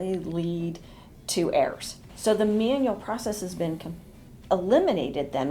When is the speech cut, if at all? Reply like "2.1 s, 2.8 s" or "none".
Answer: 2.1 s